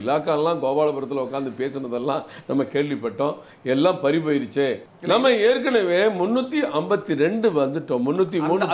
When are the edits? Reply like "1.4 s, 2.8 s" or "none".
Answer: 4.9 s